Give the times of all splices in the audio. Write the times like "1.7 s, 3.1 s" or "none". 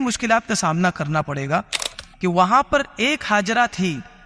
1.9 s